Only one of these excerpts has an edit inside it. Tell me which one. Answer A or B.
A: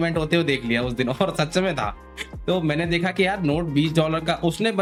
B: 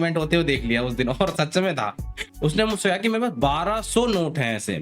B